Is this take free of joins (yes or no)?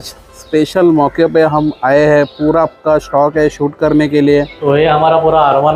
no